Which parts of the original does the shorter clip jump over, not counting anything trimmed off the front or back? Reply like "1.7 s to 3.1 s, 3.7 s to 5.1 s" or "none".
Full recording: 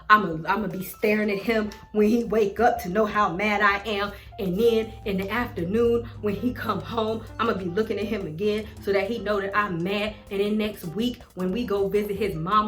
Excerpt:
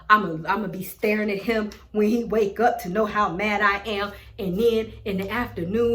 none